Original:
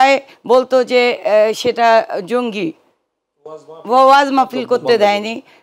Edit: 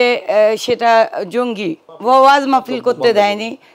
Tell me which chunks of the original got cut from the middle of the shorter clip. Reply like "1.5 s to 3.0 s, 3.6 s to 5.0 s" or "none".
2.8 s to 3.7 s